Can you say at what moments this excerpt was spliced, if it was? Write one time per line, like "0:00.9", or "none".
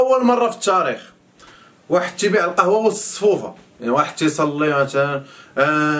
none

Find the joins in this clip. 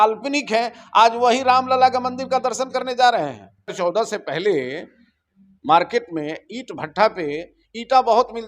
0:03.7

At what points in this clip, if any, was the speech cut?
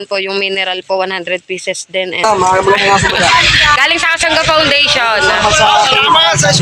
0:02.2

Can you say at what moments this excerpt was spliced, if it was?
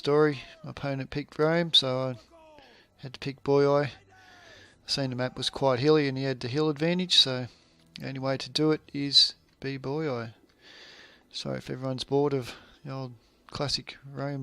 0:08.1

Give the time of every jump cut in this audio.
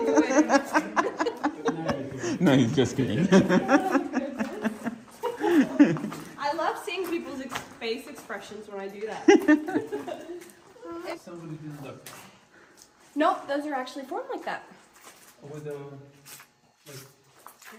none

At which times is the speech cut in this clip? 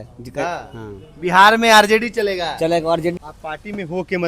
0:03.1

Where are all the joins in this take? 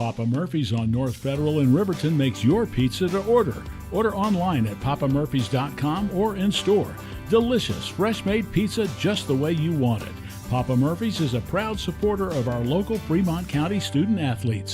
0:01.2

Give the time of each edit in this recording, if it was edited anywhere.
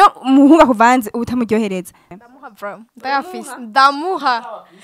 0:02.0

